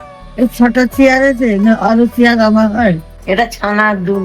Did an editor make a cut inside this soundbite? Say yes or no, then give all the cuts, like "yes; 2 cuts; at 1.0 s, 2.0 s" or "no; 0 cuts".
yes; 1 cut; at 3.1 s